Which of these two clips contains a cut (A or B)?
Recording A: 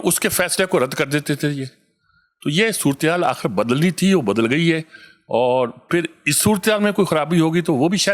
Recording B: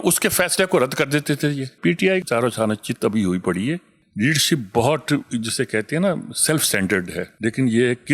B